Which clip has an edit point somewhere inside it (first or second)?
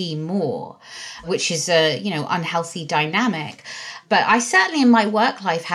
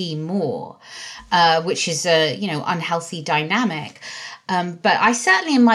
first